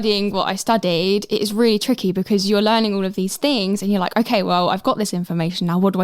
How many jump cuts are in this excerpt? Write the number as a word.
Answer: one